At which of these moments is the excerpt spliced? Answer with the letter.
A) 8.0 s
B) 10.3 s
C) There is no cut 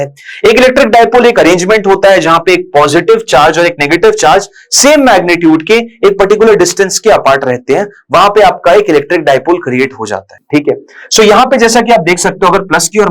C